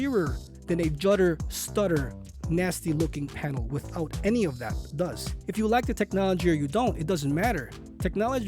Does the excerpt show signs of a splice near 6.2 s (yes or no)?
no